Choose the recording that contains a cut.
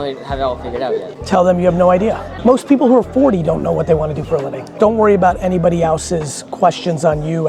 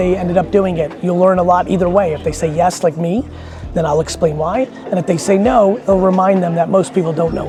first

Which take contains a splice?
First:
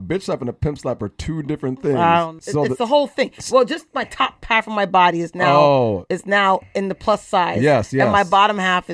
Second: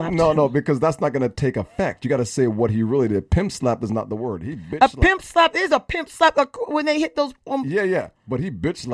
first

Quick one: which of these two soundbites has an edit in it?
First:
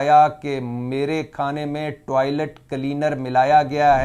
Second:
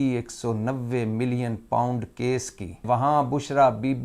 second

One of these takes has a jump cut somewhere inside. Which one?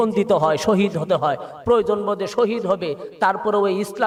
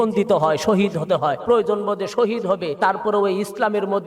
second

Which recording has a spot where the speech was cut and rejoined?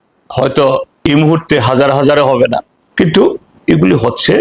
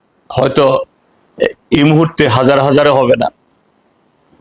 first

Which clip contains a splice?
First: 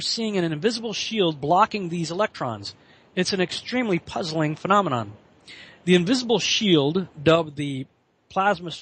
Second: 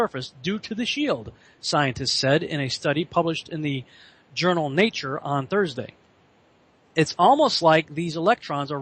second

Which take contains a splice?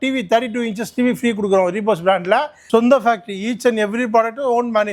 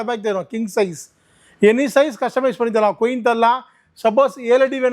first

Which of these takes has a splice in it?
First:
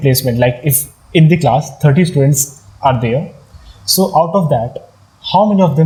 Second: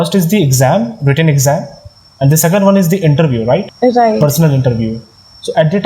second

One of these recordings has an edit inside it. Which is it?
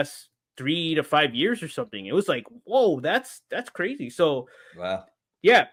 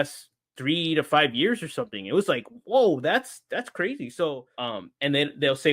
second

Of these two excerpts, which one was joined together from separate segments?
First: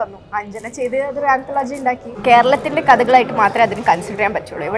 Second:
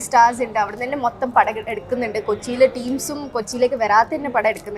first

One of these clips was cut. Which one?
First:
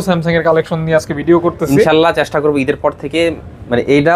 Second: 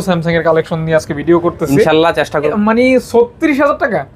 second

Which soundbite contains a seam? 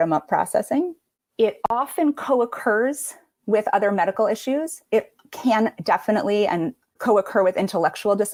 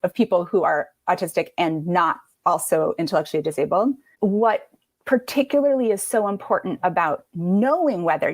second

